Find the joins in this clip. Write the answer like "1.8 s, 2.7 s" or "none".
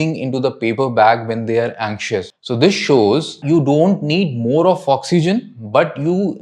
2.3 s, 3.4 s